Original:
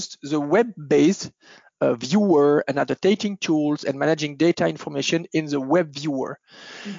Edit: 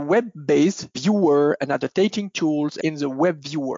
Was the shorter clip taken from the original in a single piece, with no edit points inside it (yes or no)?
no